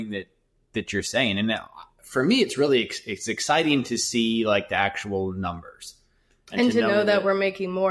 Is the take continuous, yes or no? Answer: yes